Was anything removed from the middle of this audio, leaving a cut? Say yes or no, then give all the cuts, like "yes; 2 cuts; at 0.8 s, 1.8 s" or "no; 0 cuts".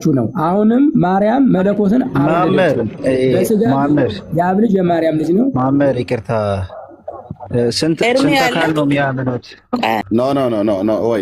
yes; 1 cut; at 10.0 s